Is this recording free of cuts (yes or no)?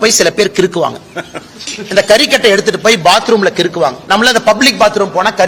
yes